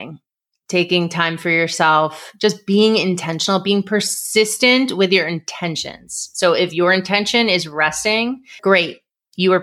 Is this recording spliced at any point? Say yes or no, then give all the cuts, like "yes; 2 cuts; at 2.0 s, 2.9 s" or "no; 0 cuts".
yes; 1 cut; at 8.6 s